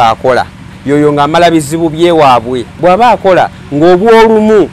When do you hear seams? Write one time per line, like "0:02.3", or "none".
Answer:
0:02.7